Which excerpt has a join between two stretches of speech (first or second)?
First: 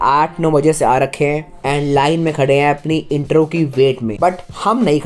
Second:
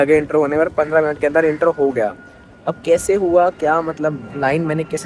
first